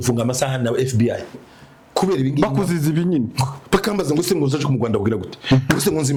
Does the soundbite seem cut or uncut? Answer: uncut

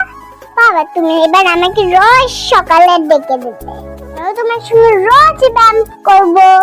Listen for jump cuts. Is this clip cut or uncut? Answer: uncut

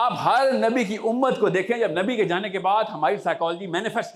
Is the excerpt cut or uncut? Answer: uncut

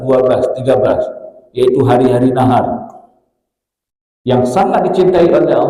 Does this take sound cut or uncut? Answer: uncut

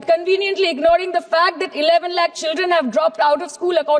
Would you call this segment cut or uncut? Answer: uncut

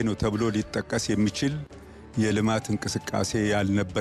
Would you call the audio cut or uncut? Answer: uncut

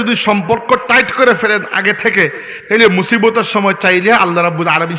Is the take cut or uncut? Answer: uncut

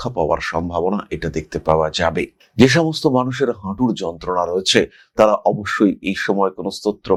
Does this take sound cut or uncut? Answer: uncut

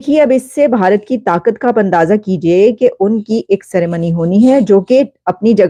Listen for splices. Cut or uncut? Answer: uncut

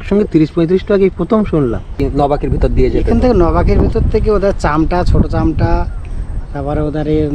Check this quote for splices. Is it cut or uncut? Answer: cut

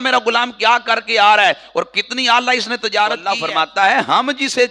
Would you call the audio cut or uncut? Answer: cut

